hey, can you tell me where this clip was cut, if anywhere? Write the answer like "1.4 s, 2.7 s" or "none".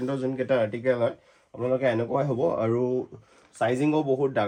none